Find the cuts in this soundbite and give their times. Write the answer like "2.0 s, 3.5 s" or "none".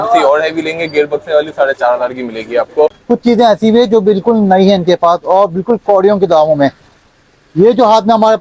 2.9 s